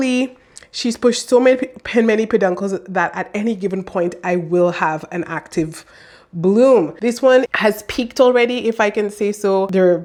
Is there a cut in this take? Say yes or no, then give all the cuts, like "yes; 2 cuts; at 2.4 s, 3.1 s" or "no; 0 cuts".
no; 0 cuts